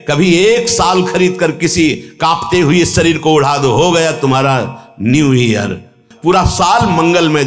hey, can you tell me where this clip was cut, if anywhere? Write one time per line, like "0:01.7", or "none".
0:06.1